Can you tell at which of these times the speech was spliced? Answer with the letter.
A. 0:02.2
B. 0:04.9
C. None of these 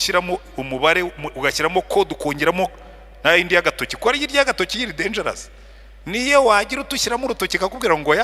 C